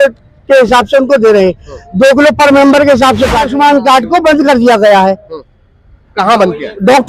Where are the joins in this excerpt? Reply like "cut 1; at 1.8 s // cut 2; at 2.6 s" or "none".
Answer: cut 1; at 3.5 s